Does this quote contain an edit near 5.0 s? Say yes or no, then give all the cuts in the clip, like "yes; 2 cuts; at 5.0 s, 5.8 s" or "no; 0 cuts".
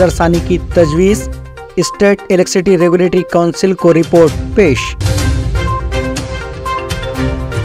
yes; 1 cut; at 5.0 s